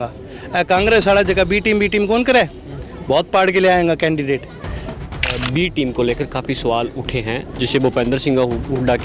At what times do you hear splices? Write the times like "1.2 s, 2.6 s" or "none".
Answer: 5.0 s